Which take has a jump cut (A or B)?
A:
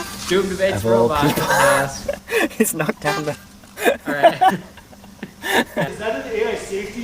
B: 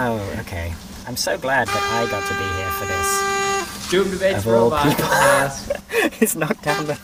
A